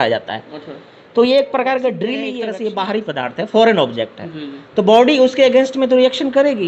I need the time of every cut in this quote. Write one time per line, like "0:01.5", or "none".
0:02.4